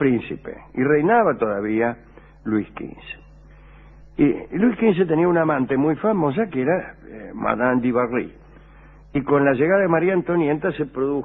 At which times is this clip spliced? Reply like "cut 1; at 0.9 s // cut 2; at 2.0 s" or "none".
none